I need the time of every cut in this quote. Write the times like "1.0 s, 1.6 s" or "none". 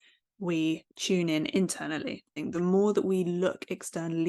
0.9 s, 2.3 s